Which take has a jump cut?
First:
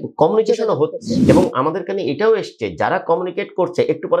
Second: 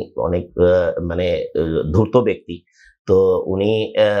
first; 1 cut; at 1.1 s

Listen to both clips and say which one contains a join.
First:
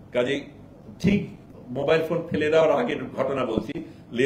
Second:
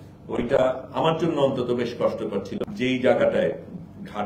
second; 1 cut; at 2.5 s

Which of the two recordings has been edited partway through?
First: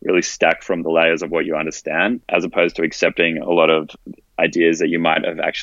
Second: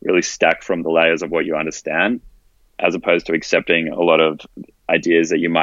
first; 1 cut; at 2.2 s

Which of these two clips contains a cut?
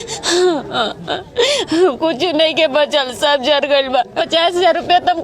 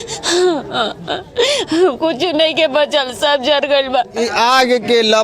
first; 1 cut; at 4.1 s

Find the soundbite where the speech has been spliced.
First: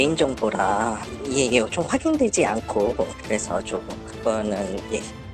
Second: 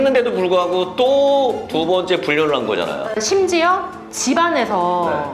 first; 1 cut; at 1.0 s

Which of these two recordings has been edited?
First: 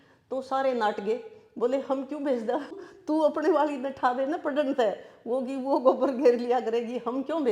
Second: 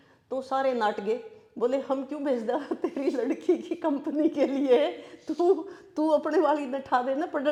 first; 1 cut; at 2.7 s

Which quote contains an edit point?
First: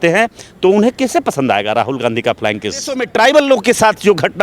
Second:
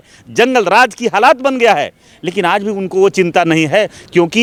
first; 1 cut; at 3.0 s

